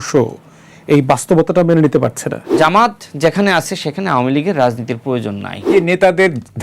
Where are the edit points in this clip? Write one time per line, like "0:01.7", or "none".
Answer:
0:02.5
0:05.7